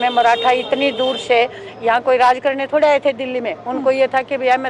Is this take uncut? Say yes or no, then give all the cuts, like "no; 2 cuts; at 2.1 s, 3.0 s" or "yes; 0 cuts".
yes; 0 cuts